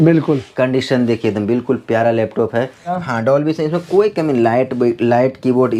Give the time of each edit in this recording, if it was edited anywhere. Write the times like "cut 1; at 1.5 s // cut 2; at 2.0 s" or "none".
cut 1; at 3.0 s